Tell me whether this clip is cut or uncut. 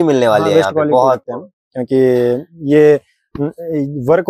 uncut